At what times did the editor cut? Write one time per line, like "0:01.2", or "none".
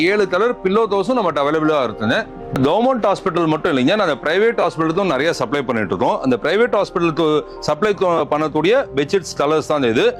none